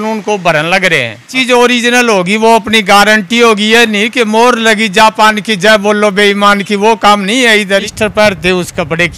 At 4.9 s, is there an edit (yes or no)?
no